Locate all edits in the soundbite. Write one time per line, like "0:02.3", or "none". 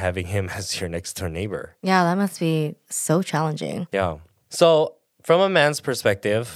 0:01.7
0:02.8
0:04.0

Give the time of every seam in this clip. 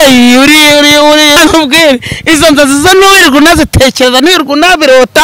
0:01.4

